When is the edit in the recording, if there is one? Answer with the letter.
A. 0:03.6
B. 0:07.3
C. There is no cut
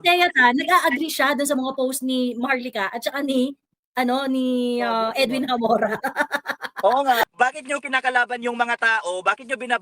B